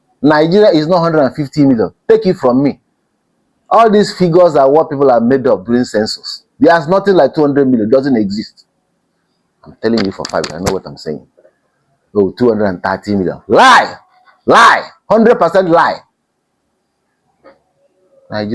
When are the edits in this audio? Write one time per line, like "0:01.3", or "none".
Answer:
none